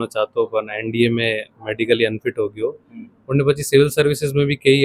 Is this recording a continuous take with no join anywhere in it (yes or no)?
yes